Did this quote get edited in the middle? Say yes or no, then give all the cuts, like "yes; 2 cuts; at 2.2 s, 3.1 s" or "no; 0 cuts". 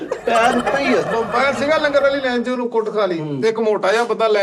yes; 1 cut; at 1.1 s